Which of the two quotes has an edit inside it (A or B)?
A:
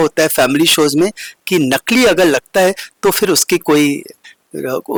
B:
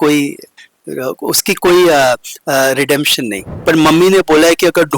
B